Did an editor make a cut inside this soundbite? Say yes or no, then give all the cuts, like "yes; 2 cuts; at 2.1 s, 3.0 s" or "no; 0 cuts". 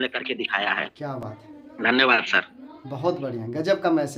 no; 0 cuts